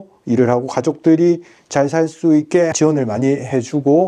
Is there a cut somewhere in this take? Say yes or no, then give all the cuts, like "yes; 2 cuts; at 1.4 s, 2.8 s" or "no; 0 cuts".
yes; 1 cut; at 2.7 s